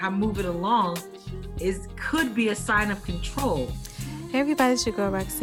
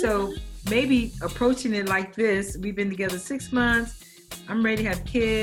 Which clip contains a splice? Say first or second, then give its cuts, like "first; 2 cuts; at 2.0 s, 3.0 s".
first; 1 cut; at 4.2 s